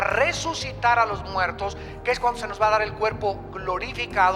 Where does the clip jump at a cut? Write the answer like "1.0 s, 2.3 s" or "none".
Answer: none